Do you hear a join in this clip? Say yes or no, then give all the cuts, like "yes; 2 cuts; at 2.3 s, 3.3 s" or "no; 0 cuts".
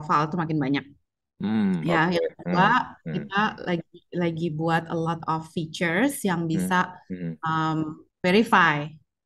no; 0 cuts